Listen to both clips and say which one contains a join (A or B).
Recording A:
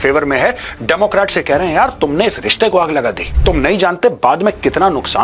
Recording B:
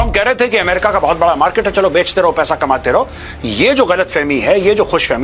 A